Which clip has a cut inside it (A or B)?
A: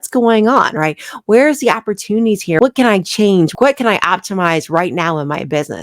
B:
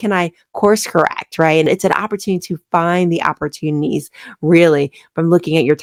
A